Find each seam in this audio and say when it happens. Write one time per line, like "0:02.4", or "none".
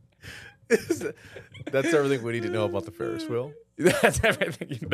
none